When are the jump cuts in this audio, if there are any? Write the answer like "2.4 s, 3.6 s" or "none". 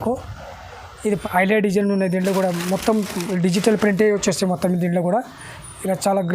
1.1 s